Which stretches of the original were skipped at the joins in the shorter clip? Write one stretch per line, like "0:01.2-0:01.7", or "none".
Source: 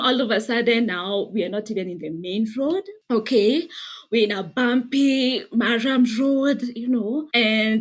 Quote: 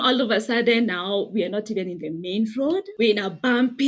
0:02.9-0:04.0